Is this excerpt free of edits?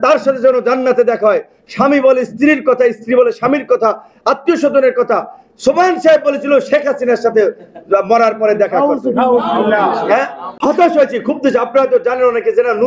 no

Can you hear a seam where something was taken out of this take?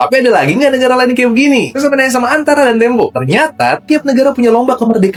no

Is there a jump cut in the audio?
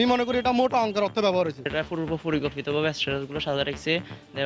yes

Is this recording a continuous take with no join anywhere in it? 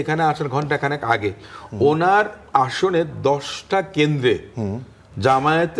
yes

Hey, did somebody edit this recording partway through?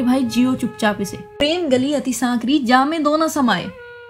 yes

